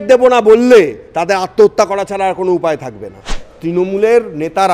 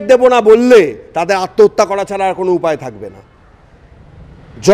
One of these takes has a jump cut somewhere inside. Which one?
first; 1 cut; at 3.5 s

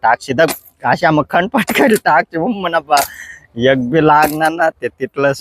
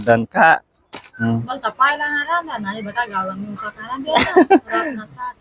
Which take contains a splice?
second; 1 cut; at 1.0 s

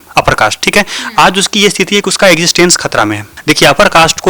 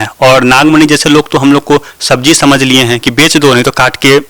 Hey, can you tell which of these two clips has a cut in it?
first; 1 cut; at 3.3 s

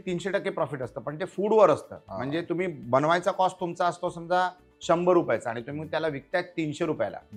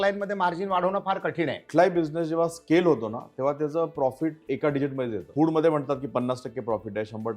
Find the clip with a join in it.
second; 2 cuts; at 1.6 s, 5.2 s

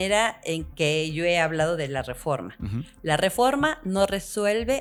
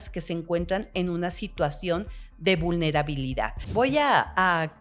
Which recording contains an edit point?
second; 1 cut; at 3.6 s

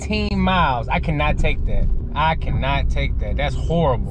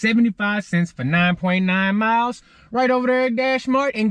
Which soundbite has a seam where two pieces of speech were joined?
first; 1 cut; at 1.9 s

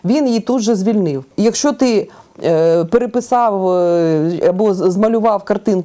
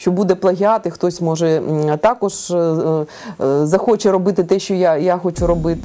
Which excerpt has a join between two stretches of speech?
first; 1 cut; at 1.3 s

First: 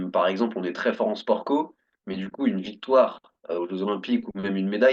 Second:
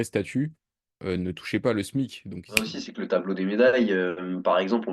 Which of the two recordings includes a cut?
second; 1 cut; at 2.7 s

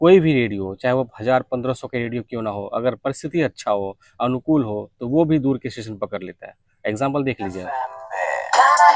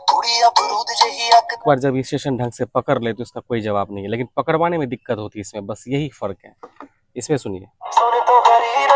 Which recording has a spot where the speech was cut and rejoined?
second; 1 cut; at 1.6 s

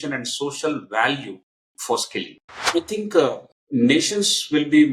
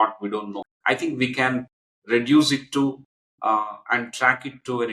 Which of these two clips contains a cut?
first; 2 cuts; at 2.6 s, 3.5 s

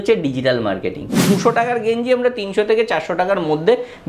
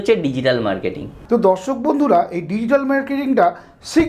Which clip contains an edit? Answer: first; 1 cut; at 1.2 s

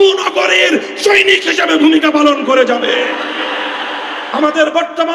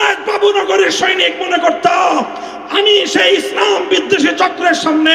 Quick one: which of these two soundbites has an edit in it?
first; 1 cut; at 4.2 s

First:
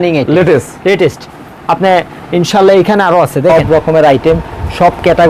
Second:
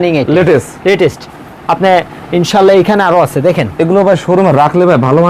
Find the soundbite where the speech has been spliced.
first; 1 cut; at 3.5 s

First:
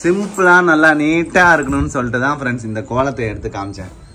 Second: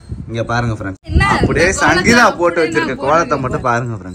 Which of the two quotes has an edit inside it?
second; 1 cut; at 1.1 s

